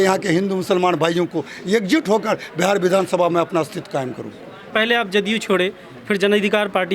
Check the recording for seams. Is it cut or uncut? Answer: cut